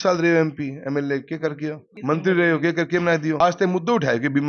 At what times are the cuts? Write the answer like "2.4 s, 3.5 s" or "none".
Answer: none